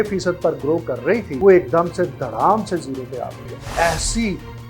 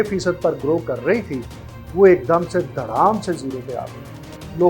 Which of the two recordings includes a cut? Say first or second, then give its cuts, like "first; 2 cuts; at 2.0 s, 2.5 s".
first; 2 cuts; at 1.3 s, 3.6 s